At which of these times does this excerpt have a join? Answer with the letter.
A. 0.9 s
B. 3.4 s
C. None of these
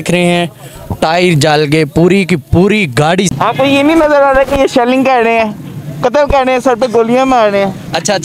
B